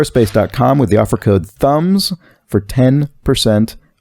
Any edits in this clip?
yes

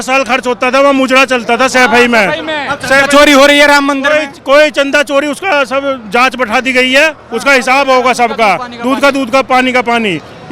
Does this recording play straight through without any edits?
yes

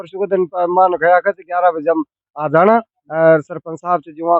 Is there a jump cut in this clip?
no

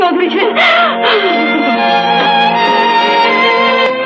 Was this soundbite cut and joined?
no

